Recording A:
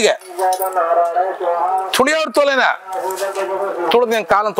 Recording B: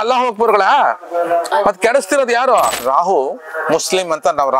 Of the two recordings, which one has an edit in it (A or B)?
B